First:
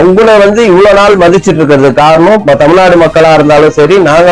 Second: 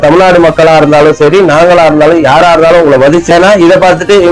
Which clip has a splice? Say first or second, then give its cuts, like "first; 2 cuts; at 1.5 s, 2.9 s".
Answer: second; 1 cut; at 3.3 s